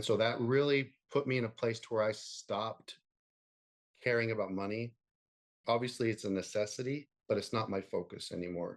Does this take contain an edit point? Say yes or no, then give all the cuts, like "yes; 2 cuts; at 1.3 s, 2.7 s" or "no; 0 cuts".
no; 0 cuts